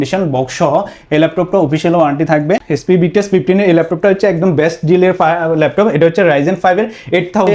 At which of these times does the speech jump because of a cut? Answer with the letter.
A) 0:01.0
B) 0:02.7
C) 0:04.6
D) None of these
B